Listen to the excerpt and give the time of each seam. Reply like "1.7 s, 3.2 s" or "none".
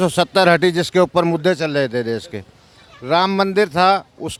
none